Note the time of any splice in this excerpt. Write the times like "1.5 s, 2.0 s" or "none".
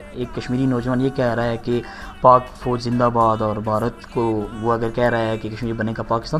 none